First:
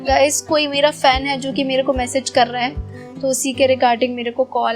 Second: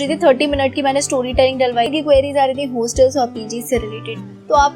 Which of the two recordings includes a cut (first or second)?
second